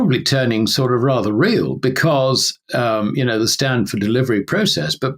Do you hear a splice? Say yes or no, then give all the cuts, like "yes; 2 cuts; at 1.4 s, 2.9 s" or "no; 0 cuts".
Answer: yes; 1 cut; at 2.5 s